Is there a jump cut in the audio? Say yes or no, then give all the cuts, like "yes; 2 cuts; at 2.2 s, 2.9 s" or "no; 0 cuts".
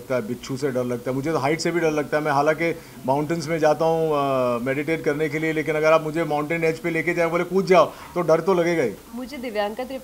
yes; 1 cut; at 9.0 s